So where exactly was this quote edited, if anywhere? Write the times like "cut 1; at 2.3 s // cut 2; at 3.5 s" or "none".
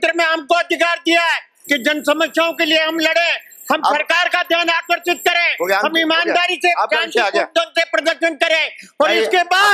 none